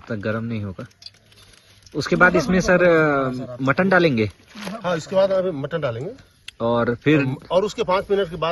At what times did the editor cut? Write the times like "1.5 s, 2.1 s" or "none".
none